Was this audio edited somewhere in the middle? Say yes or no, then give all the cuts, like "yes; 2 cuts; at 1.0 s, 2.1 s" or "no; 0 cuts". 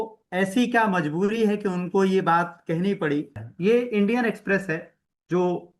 yes; 1 cut; at 3.4 s